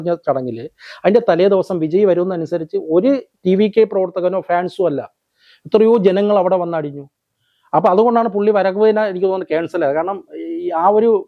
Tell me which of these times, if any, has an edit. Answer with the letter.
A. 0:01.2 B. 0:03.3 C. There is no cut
C